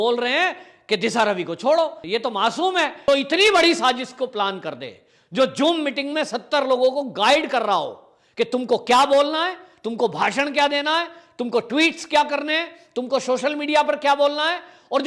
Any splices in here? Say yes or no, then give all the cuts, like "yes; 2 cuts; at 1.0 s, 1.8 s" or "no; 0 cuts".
yes; 2 cuts; at 2.0 s, 3.0 s